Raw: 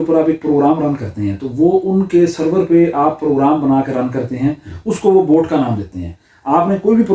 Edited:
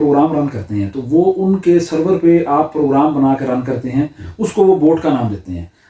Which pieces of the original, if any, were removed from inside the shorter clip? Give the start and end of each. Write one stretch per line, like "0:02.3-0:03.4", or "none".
none

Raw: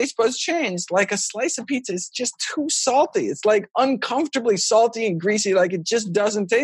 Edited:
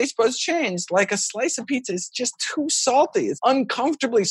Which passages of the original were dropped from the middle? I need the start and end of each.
0:03.4-0:03.7

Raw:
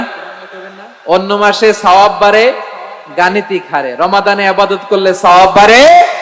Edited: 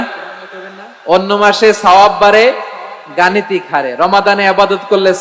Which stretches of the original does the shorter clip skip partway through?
none

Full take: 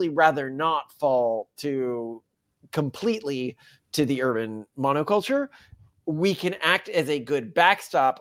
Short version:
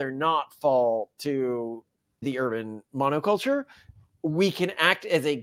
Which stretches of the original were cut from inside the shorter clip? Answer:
0:02.6-0:04.1

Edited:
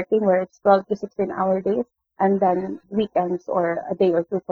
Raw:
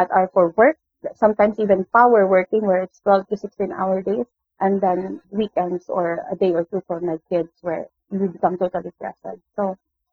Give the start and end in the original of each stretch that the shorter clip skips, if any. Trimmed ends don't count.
none

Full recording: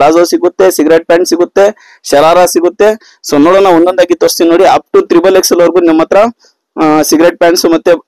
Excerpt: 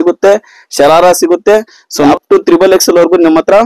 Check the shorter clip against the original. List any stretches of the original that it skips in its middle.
0:03.5-0:04.8

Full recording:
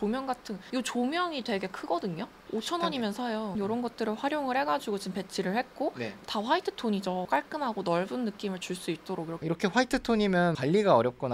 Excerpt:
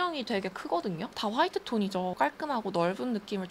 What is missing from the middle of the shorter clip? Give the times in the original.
0:02.3-0:06.2

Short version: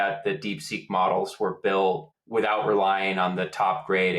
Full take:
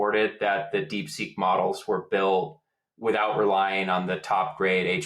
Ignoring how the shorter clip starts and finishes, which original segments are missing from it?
0:02.6-0:02.8

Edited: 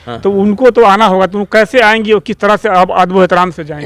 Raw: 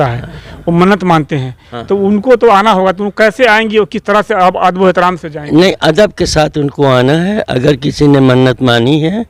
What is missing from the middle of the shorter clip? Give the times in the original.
none

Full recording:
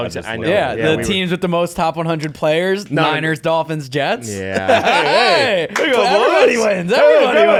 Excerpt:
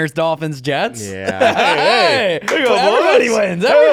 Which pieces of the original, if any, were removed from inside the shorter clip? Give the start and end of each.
none

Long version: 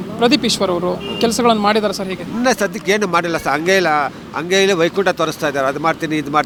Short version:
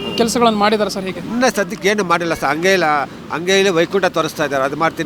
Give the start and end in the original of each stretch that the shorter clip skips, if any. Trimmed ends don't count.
none

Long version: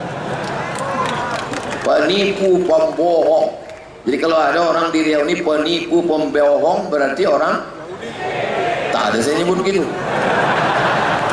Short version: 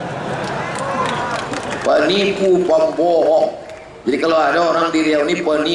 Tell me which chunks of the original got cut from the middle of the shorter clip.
none

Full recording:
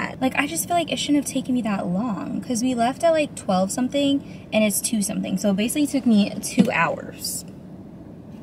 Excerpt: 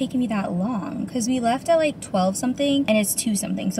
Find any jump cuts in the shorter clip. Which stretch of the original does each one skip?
0:04.2-0:04.5

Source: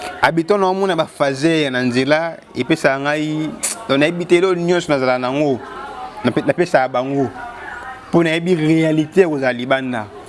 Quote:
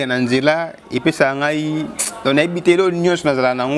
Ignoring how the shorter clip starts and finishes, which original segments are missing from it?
none

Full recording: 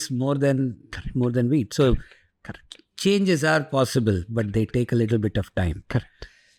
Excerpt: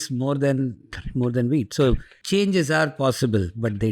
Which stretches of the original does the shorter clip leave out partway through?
0:02.1-0:02.9

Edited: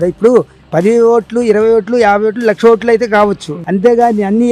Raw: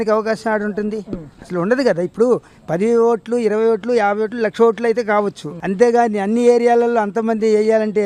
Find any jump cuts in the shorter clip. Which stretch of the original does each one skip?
none

